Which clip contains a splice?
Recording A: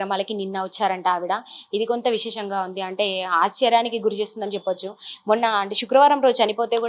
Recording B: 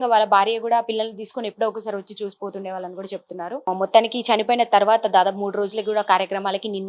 B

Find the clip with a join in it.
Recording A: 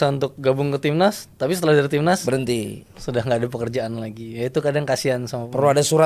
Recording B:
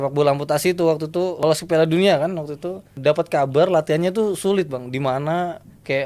B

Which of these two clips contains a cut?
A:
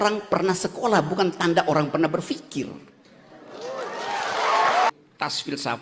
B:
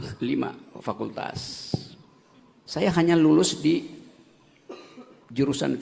A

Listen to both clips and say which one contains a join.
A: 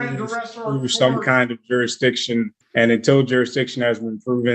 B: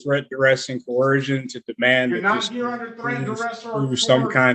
A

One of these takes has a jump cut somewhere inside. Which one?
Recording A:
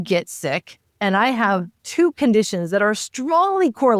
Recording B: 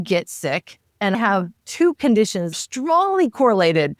B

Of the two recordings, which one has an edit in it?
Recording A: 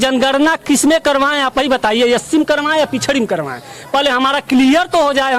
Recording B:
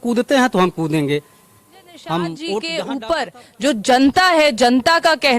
B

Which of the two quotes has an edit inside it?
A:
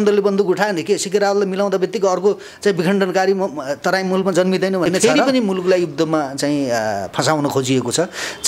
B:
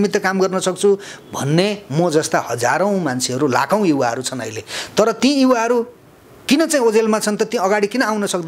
A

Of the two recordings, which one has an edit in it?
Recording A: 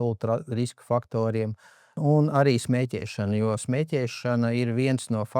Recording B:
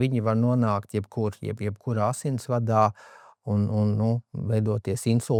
A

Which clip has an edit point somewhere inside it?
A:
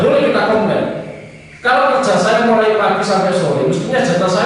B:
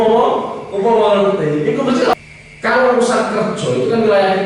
B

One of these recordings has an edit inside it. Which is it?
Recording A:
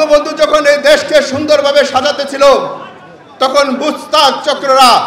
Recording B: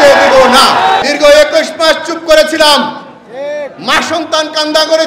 B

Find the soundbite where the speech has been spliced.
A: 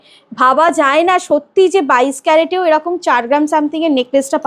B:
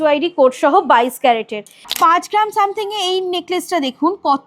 B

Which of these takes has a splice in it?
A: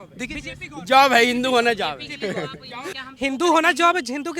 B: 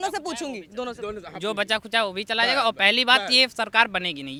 A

